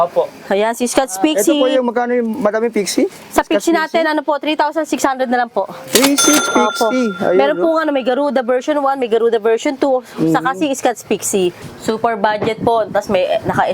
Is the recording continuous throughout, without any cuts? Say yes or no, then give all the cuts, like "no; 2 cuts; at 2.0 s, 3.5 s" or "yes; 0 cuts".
no; 1 cut; at 11.7 s